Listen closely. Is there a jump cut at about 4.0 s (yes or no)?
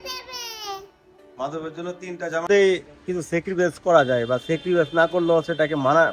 no